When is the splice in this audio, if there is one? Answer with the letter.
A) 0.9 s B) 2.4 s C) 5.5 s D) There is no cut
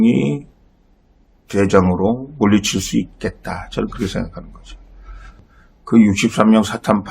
C